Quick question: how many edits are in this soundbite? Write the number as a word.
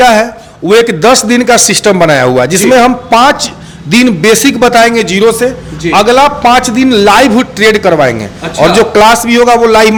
zero